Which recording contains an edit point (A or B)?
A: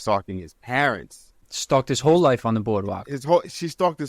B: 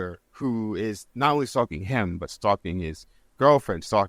A